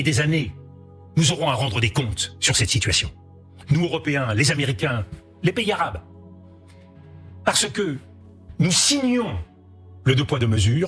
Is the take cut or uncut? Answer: uncut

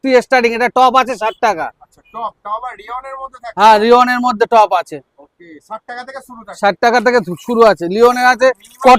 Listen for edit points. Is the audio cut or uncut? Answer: uncut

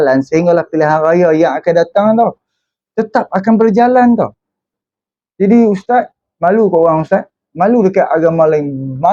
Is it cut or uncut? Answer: cut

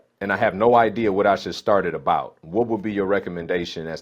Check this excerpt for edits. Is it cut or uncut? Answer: uncut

